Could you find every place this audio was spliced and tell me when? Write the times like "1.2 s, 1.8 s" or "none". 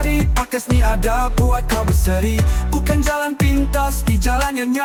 none